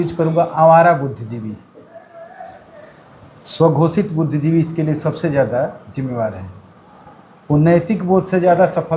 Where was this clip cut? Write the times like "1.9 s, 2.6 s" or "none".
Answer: none